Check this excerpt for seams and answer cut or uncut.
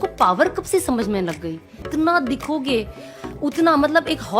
cut